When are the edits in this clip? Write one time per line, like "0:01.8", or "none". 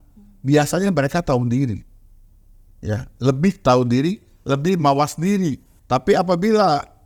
none